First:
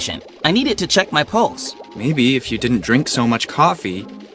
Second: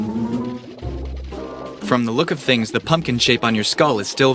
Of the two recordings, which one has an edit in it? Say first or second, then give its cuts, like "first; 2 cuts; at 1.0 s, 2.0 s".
second; 1 cut; at 1.9 s